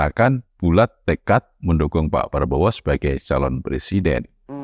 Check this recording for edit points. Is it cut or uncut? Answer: uncut